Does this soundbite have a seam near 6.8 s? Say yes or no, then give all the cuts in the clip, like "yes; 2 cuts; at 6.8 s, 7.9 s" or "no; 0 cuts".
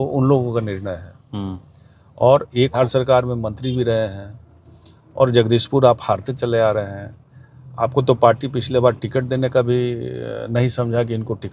no; 1 cut; at 2.8 s